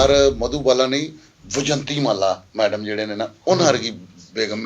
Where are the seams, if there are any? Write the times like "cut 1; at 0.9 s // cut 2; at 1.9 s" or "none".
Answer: none